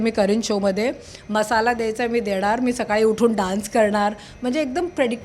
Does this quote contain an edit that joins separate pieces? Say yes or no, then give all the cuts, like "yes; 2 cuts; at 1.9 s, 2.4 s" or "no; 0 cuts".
no; 0 cuts